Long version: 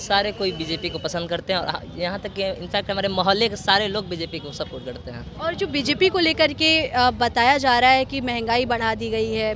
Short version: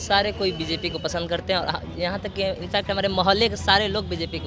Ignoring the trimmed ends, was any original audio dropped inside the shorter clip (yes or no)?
no